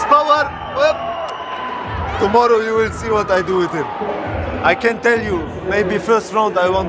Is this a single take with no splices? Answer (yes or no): yes